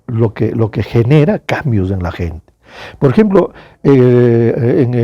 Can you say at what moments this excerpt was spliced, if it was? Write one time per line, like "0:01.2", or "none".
none